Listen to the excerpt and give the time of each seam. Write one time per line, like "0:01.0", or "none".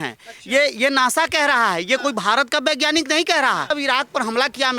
0:03.7